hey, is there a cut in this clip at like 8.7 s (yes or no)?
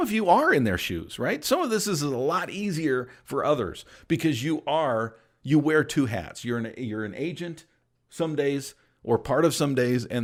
no